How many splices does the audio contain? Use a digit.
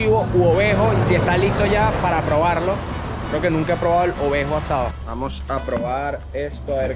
1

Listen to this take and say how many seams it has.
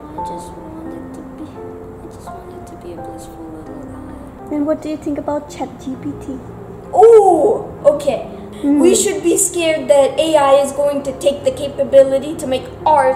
2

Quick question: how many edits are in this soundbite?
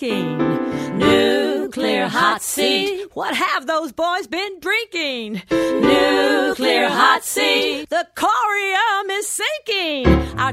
0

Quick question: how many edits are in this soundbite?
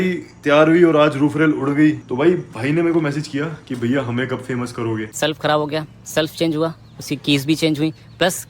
2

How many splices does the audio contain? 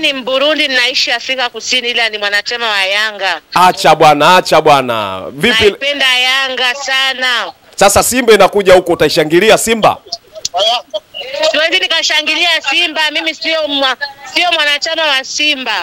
0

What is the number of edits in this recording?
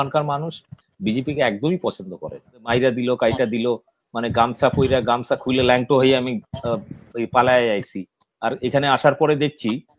1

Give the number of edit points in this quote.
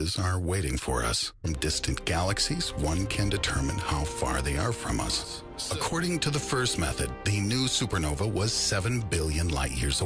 0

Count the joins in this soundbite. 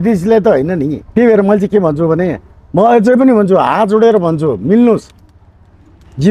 1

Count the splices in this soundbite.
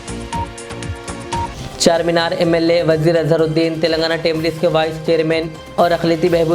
1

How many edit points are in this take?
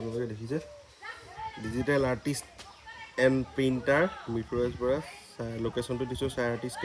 0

